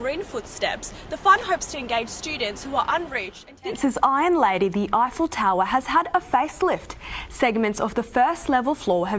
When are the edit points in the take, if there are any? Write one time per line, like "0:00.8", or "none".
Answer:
0:03.7